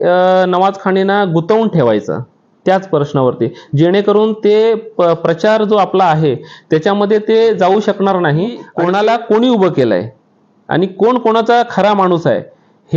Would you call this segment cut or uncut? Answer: cut